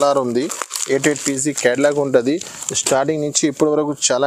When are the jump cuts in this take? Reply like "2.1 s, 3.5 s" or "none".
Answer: none

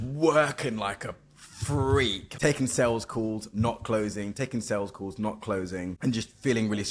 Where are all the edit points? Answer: 2.2 s, 5.9 s

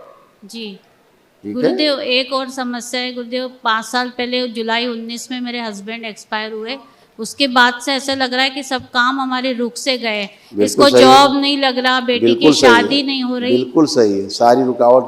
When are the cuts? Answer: 1.2 s

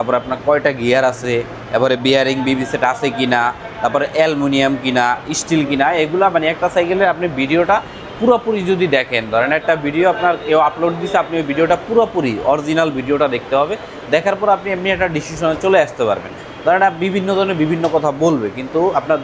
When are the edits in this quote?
none

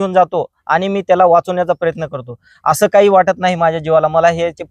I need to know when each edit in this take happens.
none

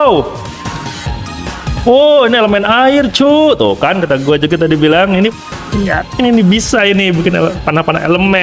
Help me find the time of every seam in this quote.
none

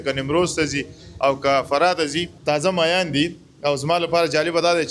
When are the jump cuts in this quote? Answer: 2.3 s

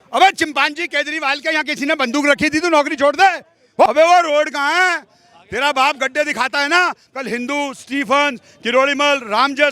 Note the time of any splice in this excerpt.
3.9 s

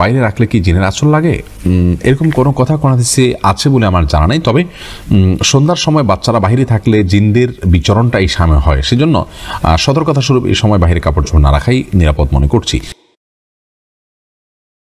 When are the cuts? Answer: none

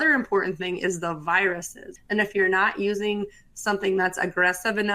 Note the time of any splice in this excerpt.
1.9 s

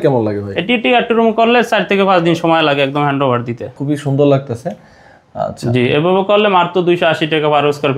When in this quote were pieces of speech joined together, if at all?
3.7 s

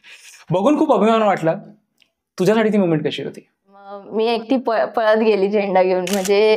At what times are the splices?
4.0 s

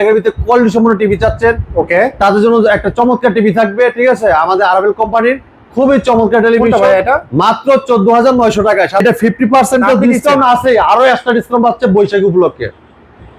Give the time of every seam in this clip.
9.0 s

